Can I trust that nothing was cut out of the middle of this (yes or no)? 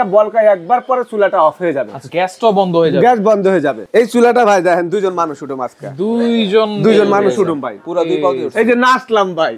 no